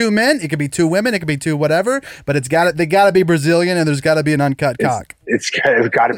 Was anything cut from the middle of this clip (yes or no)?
yes